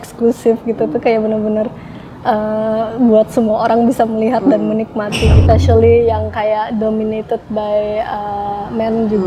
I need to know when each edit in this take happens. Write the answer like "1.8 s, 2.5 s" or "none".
5.4 s